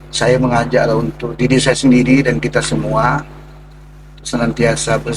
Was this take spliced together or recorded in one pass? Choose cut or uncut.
uncut